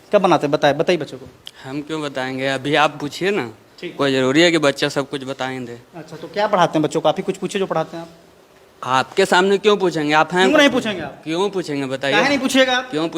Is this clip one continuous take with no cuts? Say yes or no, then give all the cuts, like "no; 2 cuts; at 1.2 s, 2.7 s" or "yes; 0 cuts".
yes; 0 cuts